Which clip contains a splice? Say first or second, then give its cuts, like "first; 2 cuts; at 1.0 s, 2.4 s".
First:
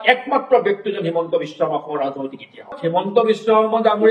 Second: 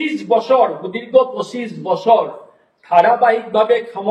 first; 1 cut; at 3.1 s